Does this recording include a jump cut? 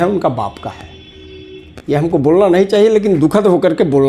no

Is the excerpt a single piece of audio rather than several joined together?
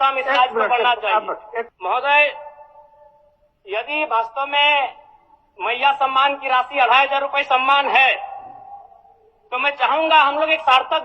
no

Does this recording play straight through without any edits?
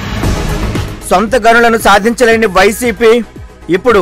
no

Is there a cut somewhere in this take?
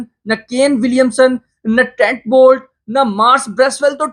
no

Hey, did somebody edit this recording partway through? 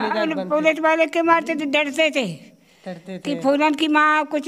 no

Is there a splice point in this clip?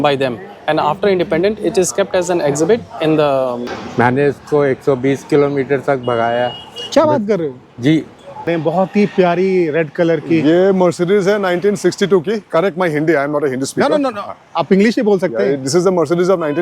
yes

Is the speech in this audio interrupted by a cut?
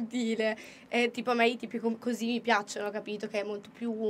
no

